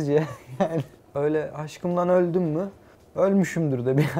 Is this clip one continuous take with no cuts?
no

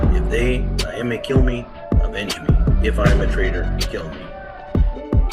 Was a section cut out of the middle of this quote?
yes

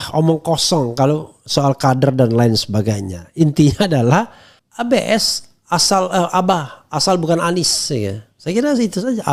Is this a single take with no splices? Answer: yes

